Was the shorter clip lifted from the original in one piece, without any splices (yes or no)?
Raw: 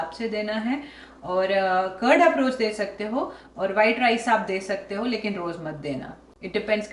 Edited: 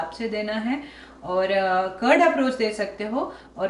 yes